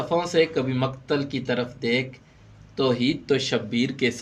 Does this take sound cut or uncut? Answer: uncut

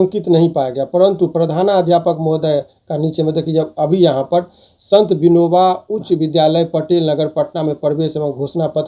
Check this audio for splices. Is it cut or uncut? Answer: uncut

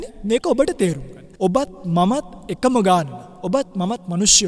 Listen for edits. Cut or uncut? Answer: uncut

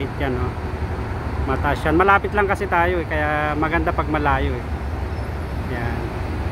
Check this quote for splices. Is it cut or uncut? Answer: uncut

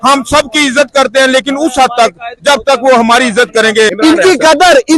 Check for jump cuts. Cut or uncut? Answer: cut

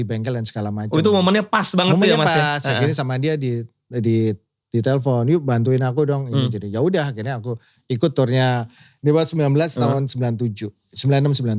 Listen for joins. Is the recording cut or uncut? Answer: uncut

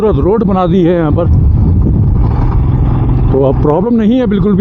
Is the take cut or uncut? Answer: uncut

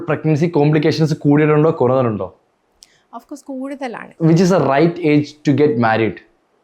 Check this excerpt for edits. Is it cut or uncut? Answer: cut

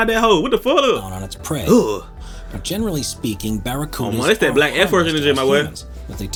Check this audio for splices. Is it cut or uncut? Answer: uncut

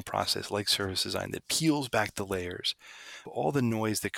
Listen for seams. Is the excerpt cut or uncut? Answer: cut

